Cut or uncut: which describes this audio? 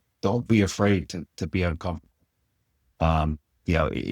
uncut